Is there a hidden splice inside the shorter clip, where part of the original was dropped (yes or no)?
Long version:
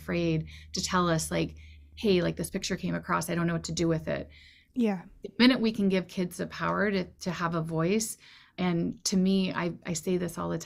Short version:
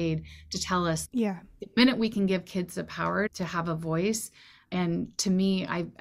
yes